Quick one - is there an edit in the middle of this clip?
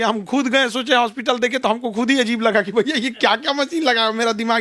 no; 0 cuts

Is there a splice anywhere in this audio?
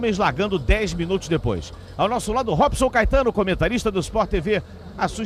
yes; 1 cut; at 1.0 s

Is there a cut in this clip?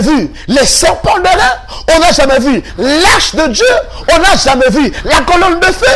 no; 0 cuts

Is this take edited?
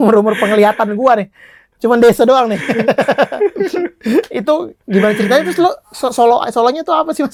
no; 0 cuts

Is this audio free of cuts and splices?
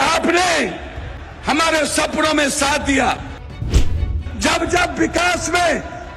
no; 1 cut; at 3.8 s

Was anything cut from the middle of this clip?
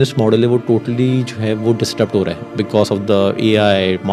no; 0 cuts

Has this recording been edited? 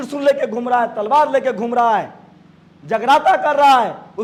no; 0 cuts

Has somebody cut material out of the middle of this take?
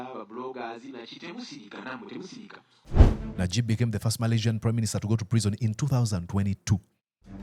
yes; 1 cut; at 2.8 s

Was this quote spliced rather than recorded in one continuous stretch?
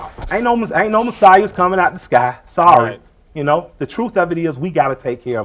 yes; 1 cut; at 4.1 s

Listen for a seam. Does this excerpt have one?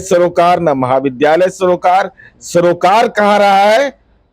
no; 0 cuts

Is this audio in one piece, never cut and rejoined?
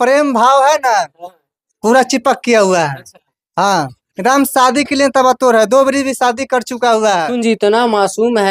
no; 1 cut; at 7.3 s

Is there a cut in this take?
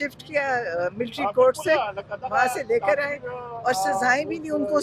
no; 0 cuts

